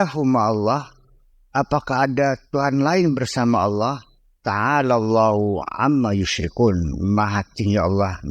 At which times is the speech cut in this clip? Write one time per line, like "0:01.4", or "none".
none

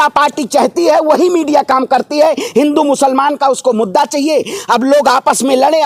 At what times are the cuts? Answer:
none

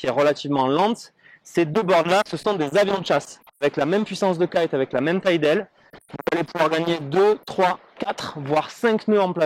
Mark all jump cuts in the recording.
0:03.6

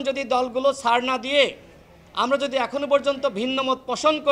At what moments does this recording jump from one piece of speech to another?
none

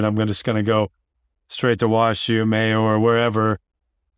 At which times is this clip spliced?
none

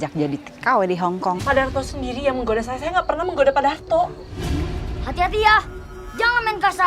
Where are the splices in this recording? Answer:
0:01.4
0:04.6

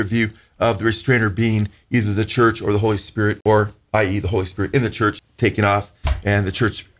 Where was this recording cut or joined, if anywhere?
0:03.4
0:05.3

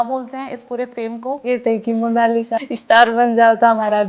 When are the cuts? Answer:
0:01.4
0:02.6

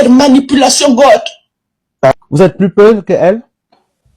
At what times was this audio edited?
0:02.1

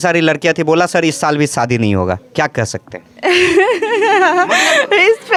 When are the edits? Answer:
none

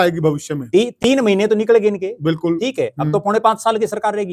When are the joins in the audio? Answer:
none

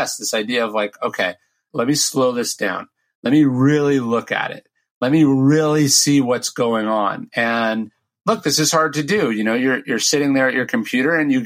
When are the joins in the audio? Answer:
0:01.6

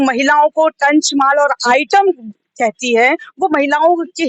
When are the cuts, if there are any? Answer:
none

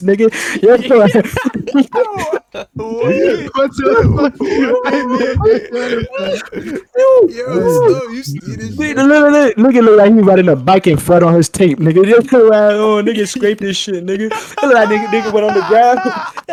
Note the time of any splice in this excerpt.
none

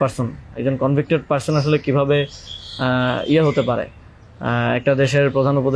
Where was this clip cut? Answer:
none

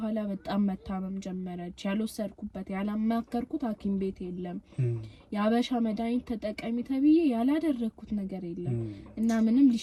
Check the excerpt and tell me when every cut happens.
none

